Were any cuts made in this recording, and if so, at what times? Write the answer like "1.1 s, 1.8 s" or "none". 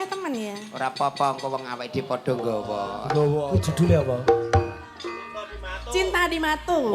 3.5 s